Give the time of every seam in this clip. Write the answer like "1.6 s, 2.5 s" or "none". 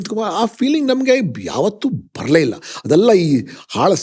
none